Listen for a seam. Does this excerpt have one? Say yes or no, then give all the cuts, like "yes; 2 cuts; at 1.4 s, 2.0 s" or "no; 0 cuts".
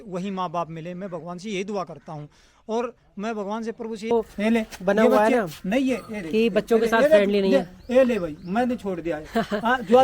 yes; 1 cut; at 4.1 s